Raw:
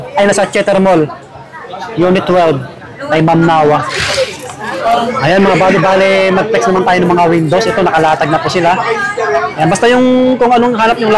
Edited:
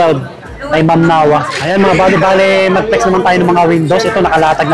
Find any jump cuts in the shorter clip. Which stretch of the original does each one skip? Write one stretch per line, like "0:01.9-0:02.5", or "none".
0:04.0-0:05.2